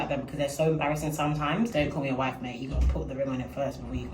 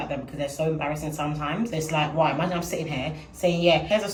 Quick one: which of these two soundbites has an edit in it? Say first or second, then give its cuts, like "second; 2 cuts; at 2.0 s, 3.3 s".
first; 1 cut; at 1.7 s